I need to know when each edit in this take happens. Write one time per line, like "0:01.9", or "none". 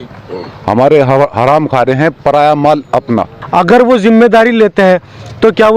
0:03.4